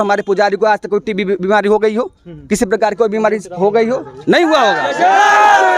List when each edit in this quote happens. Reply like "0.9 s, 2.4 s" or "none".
none